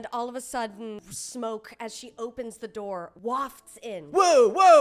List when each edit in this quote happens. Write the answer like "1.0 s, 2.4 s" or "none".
1.0 s, 3.1 s